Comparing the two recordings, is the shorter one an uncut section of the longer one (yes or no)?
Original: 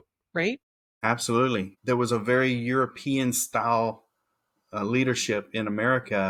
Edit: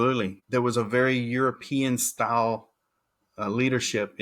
yes